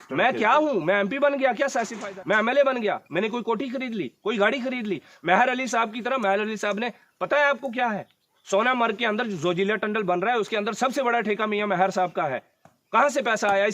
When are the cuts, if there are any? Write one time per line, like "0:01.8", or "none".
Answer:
0:02.0